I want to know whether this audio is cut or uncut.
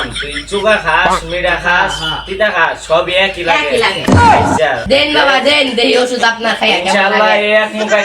cut